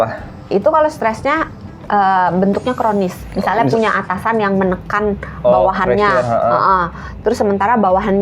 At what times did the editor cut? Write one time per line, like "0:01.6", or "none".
0:03.3